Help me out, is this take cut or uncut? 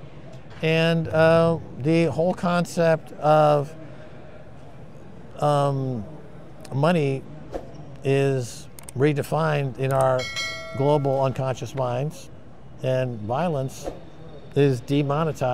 uncut